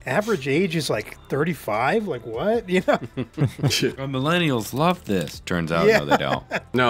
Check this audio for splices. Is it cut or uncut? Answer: uncut